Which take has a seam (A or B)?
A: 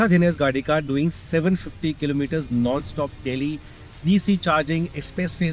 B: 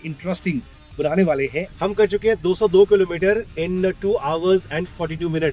B